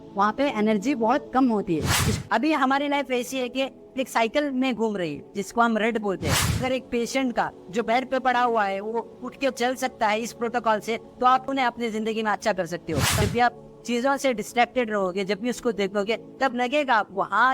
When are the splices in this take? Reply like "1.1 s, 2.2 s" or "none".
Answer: 2.0 s, 6.6 s, 13.1 s